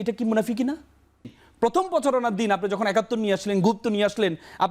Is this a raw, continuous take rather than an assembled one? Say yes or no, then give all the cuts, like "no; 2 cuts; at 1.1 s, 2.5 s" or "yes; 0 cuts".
no; 1 cut; at 1.3 s